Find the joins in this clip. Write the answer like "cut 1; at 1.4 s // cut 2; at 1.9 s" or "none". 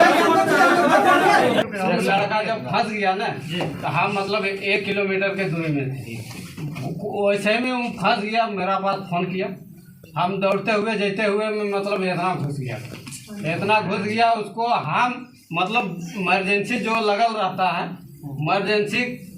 cut 1; at 1.6 s